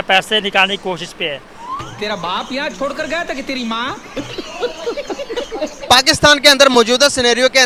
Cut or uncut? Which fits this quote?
uncut